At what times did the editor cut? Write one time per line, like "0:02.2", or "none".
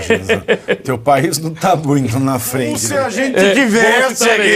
0:02.9